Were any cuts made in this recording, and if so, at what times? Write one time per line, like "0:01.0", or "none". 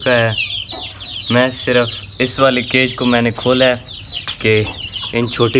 none

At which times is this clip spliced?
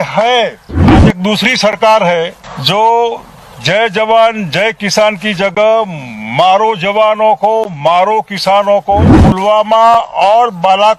0:01.0
0:02.5
0:09.2

